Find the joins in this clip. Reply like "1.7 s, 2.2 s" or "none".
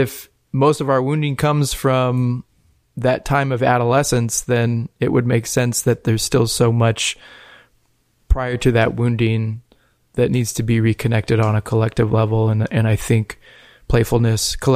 none